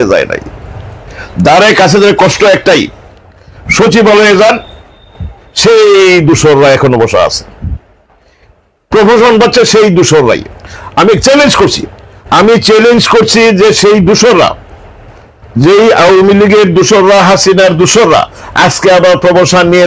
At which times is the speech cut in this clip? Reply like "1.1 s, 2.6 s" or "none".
none